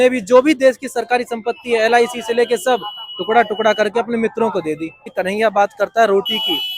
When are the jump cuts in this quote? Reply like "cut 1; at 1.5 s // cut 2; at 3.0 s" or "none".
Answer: cut 1; at 5.1 s